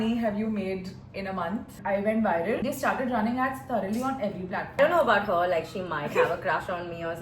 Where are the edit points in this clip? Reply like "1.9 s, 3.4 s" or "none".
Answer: 1.7 s, 2.6 s, 4.8 s